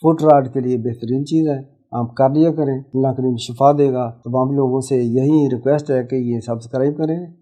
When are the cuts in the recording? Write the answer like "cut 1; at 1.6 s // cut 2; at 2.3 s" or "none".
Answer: cut 1; at 2.8 s